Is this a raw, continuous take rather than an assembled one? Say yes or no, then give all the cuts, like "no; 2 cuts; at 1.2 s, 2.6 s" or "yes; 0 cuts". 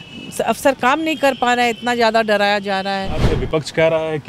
no; 1 cut; at 3.3 s